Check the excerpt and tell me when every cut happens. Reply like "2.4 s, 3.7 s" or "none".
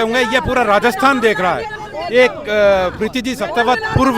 none

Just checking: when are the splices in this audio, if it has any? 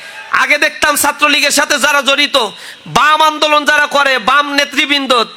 none

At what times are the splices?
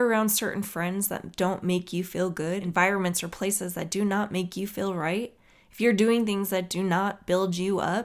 2.6 s

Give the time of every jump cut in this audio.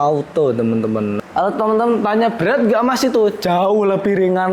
1.2 s

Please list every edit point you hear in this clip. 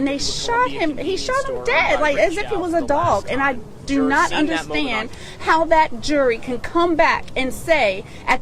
3.3 s

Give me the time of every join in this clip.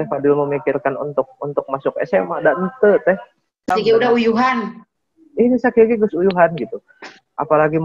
3.7 s

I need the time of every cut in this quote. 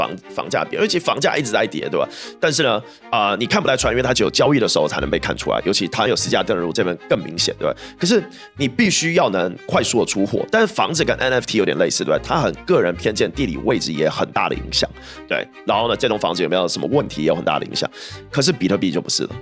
none

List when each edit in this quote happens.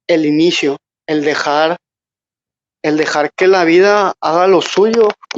none

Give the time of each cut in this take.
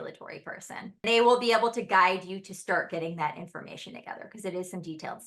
1.0 s

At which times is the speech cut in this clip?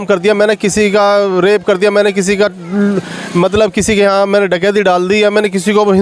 none

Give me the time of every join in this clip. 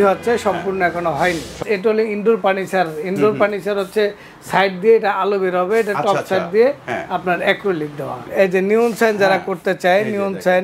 1.6 s, 8.1 s

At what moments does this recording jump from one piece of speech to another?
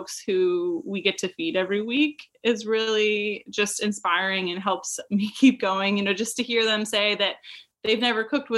none

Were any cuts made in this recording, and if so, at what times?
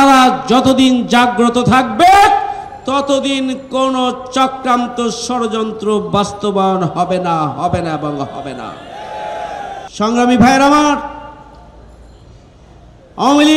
none

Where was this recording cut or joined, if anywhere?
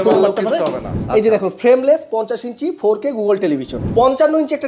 1.0 s, 3.8 s

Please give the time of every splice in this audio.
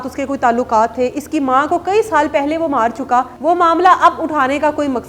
3.3 s

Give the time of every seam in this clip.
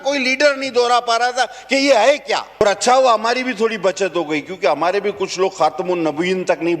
2.6 s

